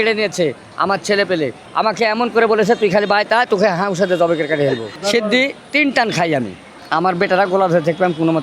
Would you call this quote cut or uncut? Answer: cut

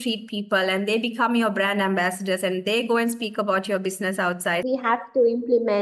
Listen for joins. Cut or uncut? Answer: cut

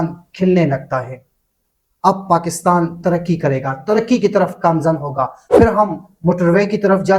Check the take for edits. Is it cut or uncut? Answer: cut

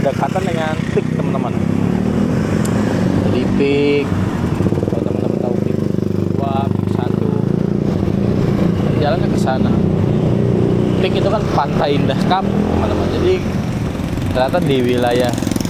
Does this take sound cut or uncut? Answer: uncut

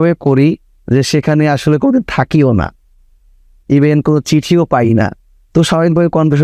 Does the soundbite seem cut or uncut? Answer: uncut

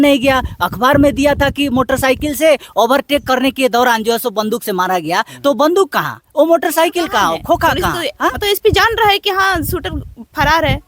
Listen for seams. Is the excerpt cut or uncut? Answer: cut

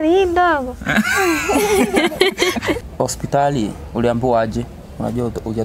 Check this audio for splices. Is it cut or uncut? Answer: cut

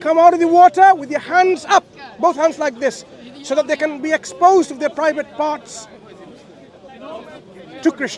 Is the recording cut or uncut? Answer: uncut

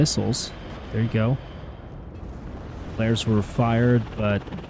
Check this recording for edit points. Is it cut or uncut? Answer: uncut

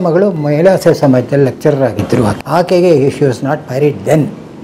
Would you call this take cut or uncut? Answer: uncut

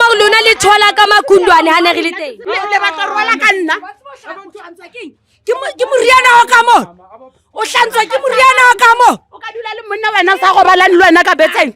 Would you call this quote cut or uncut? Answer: cut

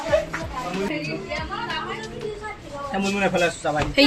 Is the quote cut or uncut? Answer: cut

